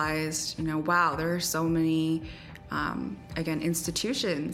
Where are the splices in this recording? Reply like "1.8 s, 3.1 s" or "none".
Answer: none